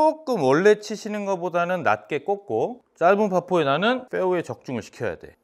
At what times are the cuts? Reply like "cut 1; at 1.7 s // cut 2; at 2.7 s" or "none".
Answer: cut 1; at 2.8 s // cut 2; at 4.1 s